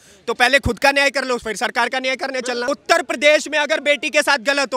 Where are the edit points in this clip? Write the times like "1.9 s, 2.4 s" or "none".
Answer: 2.6 s